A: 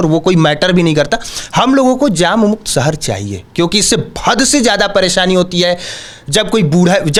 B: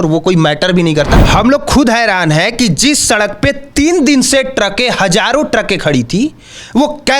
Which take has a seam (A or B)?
B